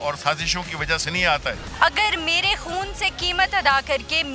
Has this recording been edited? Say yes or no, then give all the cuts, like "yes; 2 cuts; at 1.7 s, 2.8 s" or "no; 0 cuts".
yes; 1 cut; at 1.6 s